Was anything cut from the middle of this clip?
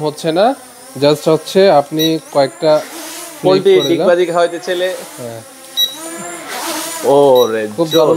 no; 0 cuts

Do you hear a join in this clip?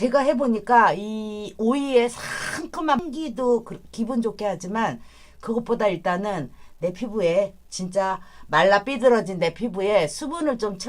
yes; 1 cut; at 3.0 s

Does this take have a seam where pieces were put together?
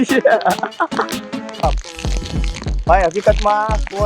yes; 1 cut; at 1.6 s

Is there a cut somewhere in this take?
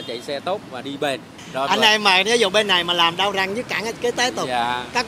no; 0 cuts

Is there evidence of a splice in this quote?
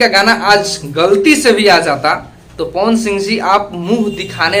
no; 0 cuts

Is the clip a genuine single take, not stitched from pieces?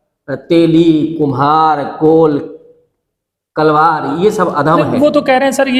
yes; 0 cuts

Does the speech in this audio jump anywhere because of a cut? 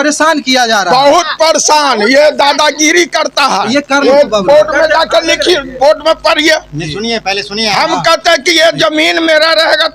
yes; 1 cut; at 4.0 s

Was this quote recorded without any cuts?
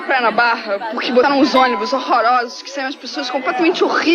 no; 1 cut; at 1.2 s

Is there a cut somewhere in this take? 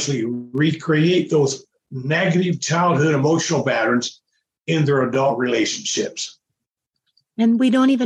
no; 0 cuts

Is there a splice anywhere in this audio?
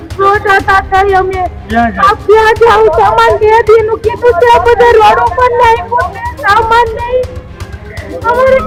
no; 0 cuts

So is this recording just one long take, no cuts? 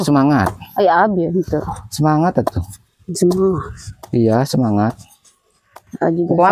yes; 0 cuts

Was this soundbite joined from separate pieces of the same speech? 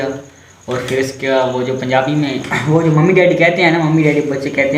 no; 0 cuts

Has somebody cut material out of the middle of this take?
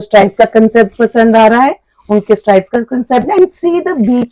no; 0 cuts

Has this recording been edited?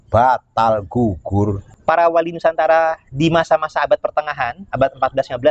yes; 1 cut; at 1.7 s

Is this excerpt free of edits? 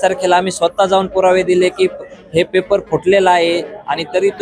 yes; 0 cuts

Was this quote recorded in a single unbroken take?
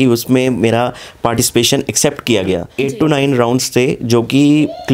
no; 1 cut; at 2.7 s

